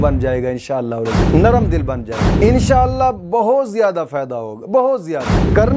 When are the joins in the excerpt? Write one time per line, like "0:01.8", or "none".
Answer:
0:02.2